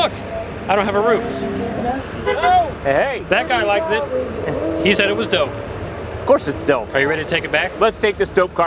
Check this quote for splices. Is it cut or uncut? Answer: uncut